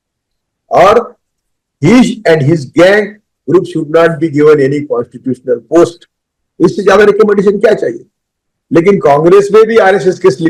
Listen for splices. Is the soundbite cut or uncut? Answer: uncut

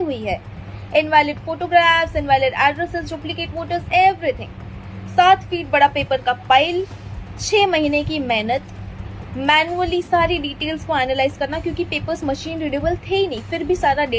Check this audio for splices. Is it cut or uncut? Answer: uncut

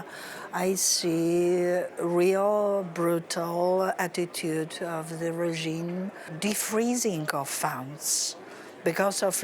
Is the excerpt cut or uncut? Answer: cut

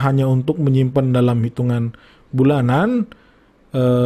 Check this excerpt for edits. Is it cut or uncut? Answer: uncut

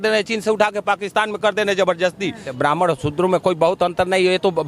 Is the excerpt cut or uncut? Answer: cut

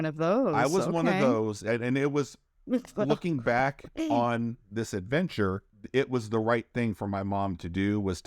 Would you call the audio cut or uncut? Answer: cut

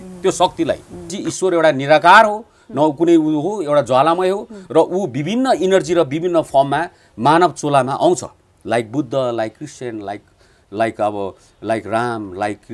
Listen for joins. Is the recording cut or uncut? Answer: cut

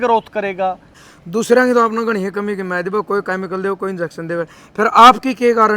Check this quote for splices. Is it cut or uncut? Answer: cut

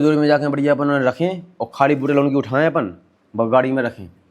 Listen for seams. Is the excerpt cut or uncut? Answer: uncut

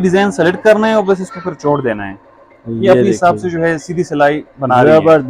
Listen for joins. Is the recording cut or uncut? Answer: uncut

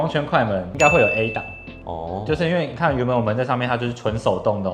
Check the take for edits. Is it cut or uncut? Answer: uncut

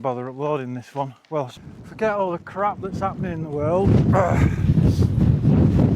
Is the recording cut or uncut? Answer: cut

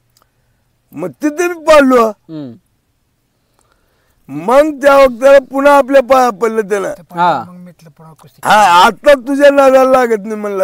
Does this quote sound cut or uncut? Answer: uncut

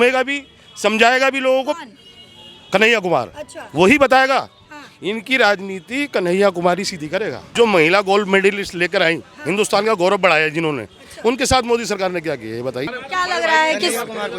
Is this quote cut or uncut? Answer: cut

